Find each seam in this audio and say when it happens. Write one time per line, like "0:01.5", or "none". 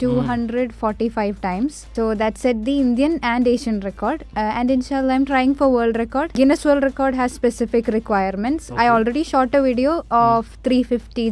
0:01.9
0:04.3
0:06.4